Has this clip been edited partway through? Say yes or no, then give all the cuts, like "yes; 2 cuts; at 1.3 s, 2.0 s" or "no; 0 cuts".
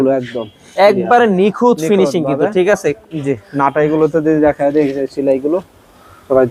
no; 0 cuts